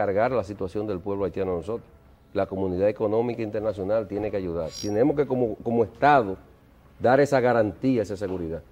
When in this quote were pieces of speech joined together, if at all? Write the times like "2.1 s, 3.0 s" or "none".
4.8 s